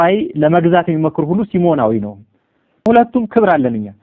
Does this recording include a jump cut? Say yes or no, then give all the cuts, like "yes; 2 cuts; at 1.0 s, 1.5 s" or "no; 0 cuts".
yes; 1 cut; at 2.9 s